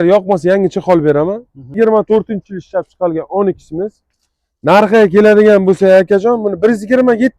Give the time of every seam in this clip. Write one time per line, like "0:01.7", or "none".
0:01.7

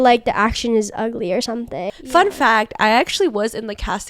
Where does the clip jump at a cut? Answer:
0:01.9

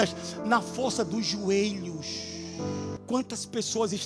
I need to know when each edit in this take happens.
0:03.0

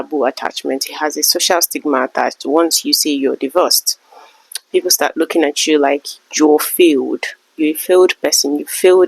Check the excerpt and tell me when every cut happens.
none

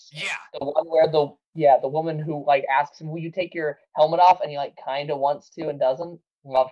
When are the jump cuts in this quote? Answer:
0:01.4

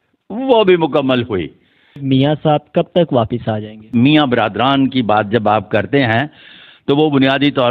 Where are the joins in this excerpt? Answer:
0:02.0
0:03.8

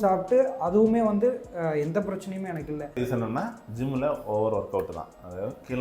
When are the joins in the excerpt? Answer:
0:03.0

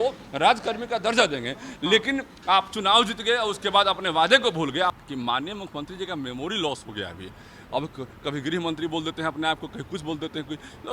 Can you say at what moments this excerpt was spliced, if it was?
0:05.0

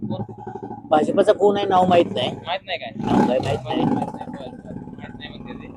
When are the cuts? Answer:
none

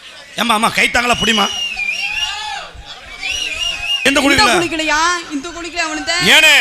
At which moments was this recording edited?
0:04.1

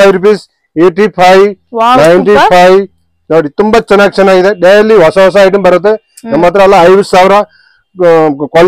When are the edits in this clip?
none

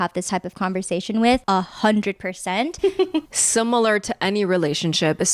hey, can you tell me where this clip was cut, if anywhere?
0:01.4
0:03.3

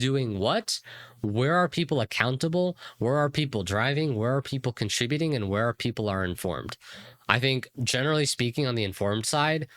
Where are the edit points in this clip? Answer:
none

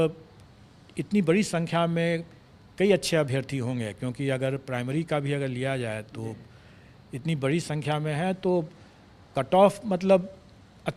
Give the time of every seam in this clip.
none

